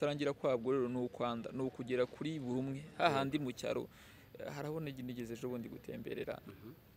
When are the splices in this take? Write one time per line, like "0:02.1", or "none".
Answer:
none